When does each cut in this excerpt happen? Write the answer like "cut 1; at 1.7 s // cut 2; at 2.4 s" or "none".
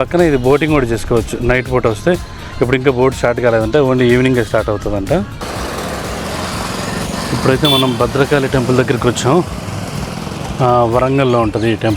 cut 1; at 5.4 s